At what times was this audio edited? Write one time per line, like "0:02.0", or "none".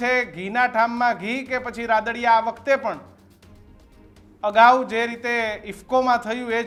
none